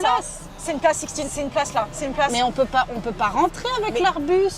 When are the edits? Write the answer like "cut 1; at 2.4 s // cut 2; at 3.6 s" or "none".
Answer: none